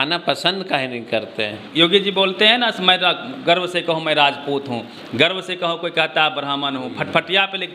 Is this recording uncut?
no; 1 cut; at 1.6 s

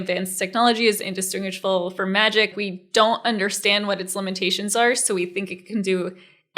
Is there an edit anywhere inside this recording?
yes; 1 cut; at 2.5 s

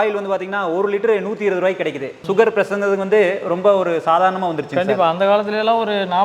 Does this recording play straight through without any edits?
no; 1 cut; at 2.1 s

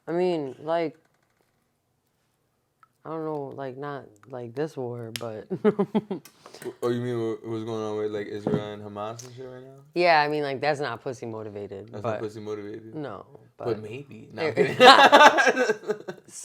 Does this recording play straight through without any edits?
yes; 0 cuts

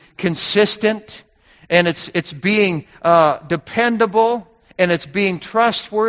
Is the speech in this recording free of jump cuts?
yes; 0 cuts

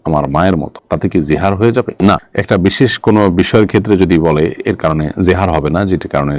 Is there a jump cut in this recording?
no; 0 cuts

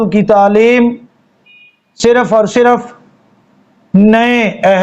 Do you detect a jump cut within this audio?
no; 0 cuts

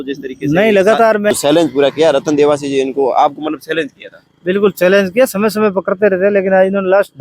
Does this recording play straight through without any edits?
no; 1 cut; at 1.3 s

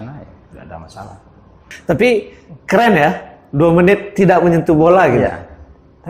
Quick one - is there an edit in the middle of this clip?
yes; 1 cut; at 1.6 s

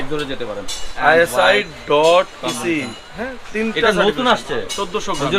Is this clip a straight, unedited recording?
no; 1 cut; at 0.9 s

